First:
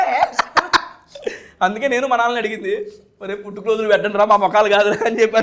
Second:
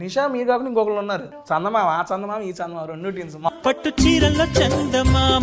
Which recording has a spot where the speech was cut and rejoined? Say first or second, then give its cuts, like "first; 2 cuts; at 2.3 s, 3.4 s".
second; 2 cuts; at 1.3 s, 3.5 s